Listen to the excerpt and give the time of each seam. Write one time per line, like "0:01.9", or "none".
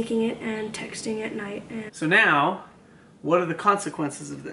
0:01.8